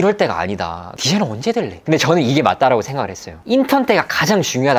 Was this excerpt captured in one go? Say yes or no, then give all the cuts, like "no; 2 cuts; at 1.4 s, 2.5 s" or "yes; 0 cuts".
no; 3 cuts; at 0.9 s, 1.8 s, 3.3 s